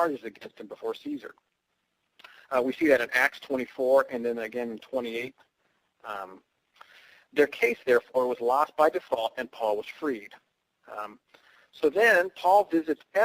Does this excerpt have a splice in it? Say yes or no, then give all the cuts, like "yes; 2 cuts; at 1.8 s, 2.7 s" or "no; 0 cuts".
no; 0 cuts